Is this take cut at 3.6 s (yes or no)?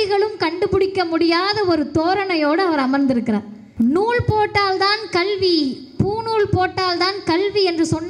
yes